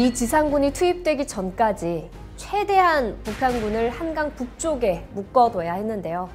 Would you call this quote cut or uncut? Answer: uncut